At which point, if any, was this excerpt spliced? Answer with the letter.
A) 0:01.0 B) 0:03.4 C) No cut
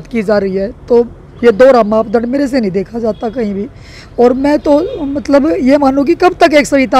C